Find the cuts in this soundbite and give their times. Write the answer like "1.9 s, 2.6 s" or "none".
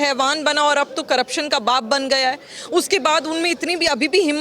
none